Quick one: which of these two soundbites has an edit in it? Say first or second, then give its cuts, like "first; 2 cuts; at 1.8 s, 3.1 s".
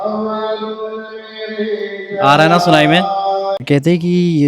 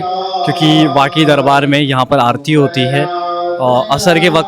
first; 1 cut; at 3.6 s